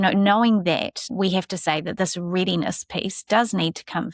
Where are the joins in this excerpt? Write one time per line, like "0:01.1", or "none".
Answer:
0:01.1